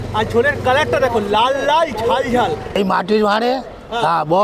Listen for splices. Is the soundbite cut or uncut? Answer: cut